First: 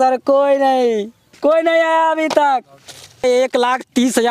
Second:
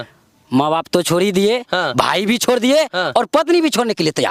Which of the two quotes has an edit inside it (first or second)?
first